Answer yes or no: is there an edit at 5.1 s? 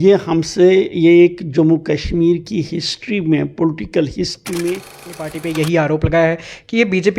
yes